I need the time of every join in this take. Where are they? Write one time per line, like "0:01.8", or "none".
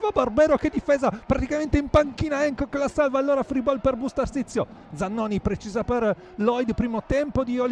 none